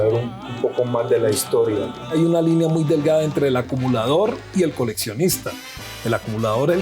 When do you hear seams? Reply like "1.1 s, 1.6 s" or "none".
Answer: 2.0 s